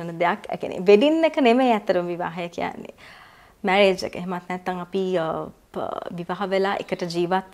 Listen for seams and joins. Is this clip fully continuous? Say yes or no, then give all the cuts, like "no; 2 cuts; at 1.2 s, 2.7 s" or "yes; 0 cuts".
yes; 0 cuts